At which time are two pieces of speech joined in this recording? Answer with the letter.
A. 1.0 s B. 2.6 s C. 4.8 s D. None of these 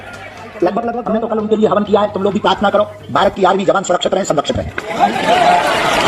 A